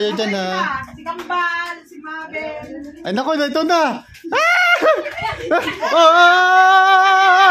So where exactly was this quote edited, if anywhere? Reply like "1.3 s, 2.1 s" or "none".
none